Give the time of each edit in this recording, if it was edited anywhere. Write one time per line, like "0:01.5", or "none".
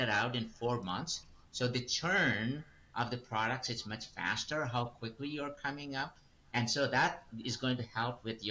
none